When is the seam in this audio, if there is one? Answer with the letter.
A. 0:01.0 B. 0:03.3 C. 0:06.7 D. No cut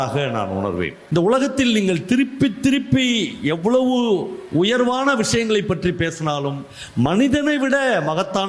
A